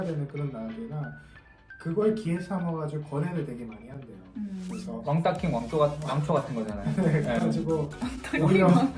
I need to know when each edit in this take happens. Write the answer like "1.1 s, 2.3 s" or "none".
none